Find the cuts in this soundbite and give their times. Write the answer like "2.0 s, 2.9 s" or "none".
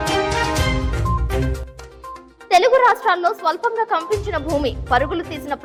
none